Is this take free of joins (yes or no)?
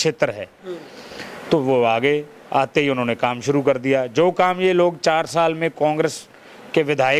yes